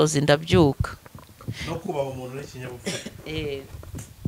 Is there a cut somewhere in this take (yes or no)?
no